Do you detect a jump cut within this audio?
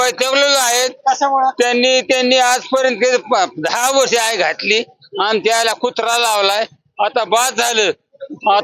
no; 0 cuts

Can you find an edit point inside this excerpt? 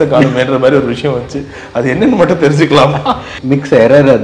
yes; 1 cut; at 3.3 s

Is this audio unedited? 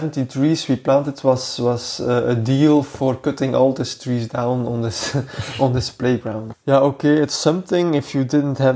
no; 1 cut; at 6.4 s

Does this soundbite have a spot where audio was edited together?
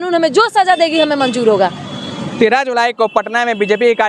no; 0 cuts

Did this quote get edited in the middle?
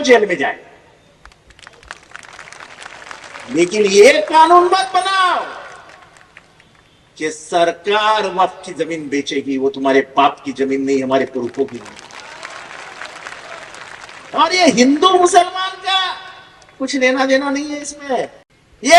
no; 0 cuts

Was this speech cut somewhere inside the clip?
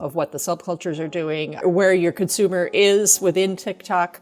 yes; 1 cut; at 1.5 s

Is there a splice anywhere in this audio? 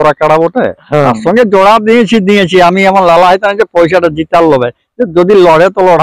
no; 0 cuts

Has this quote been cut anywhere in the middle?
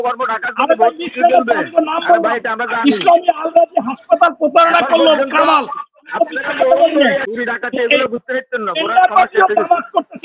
yes; 1 cut; at 7.3 s

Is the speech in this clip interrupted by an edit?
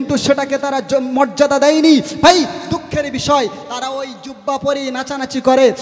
no; 0 cuts

